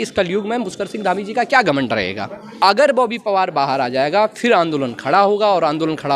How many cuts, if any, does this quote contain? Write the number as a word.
one